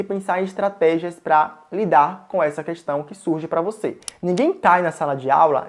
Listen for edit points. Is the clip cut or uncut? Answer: cut